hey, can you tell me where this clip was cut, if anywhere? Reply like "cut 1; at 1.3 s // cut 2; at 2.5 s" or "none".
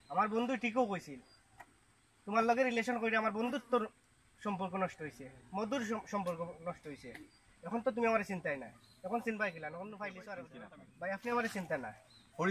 cut 1; at 10.5 s